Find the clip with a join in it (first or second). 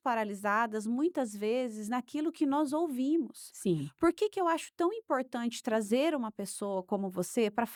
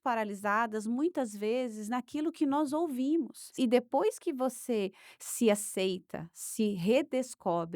second